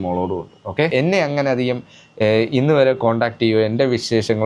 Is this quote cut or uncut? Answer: cut